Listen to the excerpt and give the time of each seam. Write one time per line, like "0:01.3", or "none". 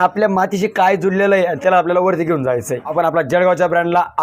0:02.9